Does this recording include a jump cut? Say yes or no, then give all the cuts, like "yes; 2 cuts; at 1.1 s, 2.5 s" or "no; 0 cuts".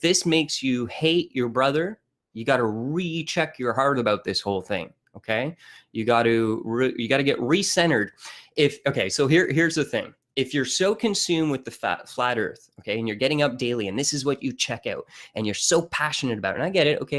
no; 0 cuts